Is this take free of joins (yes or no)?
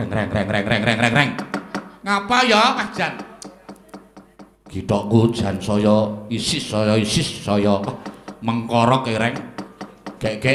yes